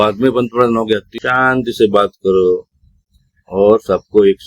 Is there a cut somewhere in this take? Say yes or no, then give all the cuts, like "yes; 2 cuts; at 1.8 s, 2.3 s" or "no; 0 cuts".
yes; 1 cut; at 1.1 s